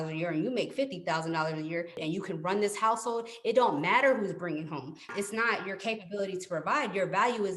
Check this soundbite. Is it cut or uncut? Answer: cut